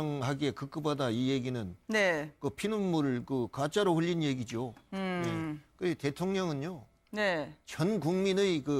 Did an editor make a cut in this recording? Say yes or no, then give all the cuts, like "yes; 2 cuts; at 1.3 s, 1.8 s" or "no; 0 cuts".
yes; 1 cut; at 1.2 s